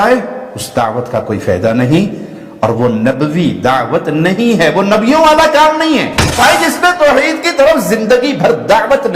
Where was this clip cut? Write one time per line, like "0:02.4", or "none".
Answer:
0:06.4